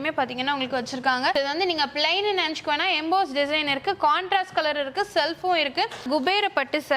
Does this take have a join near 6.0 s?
yes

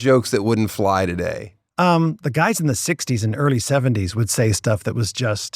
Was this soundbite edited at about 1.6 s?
yes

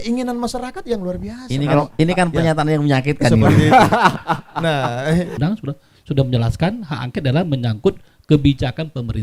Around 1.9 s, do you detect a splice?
no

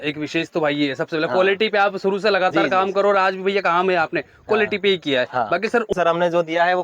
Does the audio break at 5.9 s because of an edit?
yes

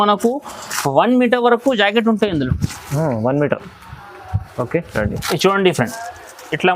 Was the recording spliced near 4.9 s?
yes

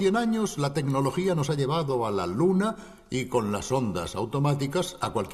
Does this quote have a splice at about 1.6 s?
yes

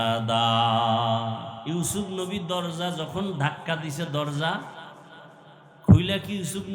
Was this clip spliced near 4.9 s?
no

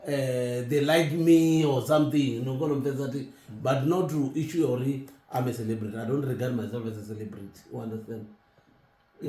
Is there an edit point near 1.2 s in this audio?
no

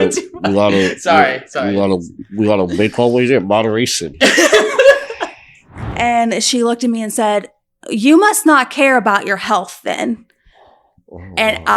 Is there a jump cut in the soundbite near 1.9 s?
no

